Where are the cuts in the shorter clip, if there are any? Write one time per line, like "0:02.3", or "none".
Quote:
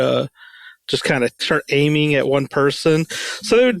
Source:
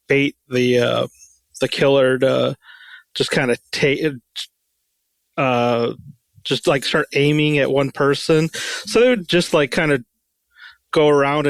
0:01.4